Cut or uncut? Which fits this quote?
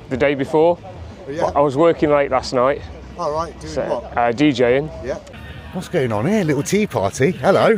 cut